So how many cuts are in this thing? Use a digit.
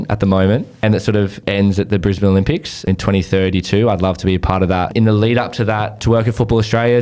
4